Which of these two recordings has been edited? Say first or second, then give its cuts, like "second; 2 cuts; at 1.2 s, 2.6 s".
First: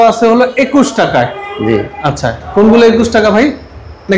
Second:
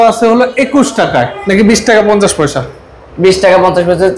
second; 1 cut; at 1.4 s